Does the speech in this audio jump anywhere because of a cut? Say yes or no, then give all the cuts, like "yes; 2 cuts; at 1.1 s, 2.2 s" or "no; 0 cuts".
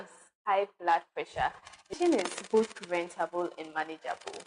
yes; 1 cut; at 2.0 s